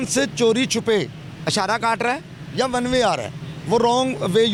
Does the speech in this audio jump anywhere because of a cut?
no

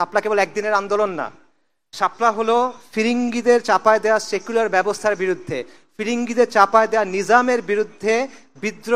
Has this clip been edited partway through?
no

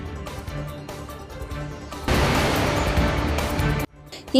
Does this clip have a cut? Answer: no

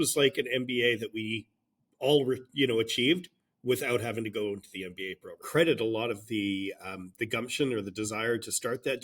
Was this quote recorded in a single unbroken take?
no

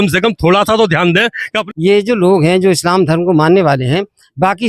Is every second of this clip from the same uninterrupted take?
no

